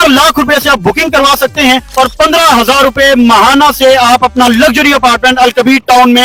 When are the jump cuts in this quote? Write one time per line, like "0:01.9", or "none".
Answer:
none